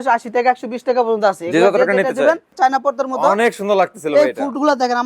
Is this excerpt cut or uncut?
cut